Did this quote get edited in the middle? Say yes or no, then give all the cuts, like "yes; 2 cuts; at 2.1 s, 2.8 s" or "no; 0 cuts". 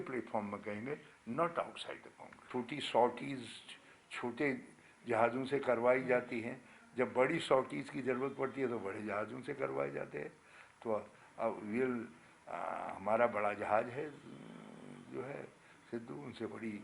yes; 1 cut; at 2.5 s